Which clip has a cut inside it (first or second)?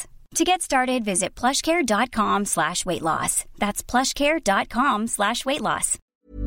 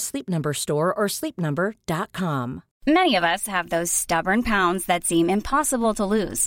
second